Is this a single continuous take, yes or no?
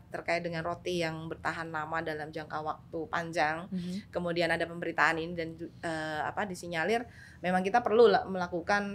yes